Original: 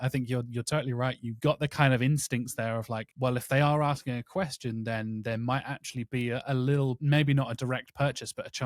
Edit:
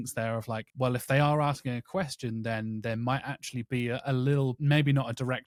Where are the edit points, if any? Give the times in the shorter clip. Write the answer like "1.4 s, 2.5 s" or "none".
none

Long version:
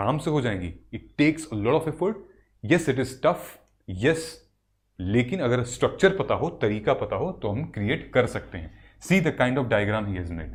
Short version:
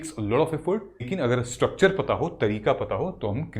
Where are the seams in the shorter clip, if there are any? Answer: 1.1 s

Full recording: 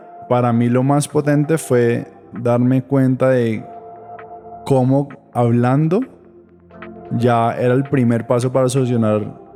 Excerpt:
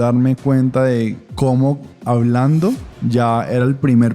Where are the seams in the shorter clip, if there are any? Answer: 1.2 s, 2.9 s

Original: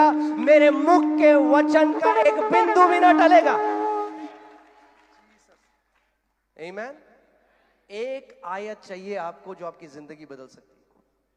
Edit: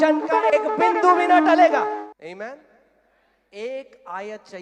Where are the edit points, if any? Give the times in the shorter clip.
2.0 s

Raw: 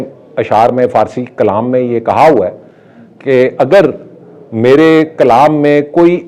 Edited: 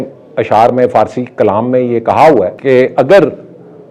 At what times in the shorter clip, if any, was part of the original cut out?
2.6 s

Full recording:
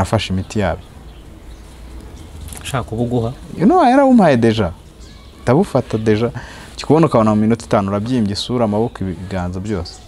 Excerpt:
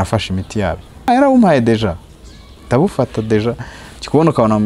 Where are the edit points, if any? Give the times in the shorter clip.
1.1 s

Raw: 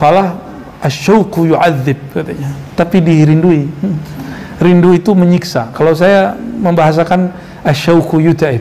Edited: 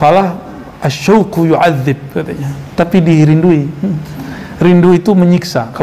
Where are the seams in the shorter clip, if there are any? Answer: none

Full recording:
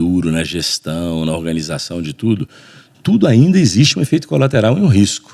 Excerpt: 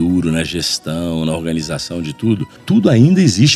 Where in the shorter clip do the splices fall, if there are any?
2.5 s

